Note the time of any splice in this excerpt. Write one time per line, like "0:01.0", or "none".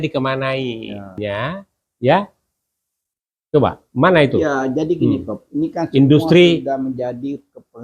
0:01.2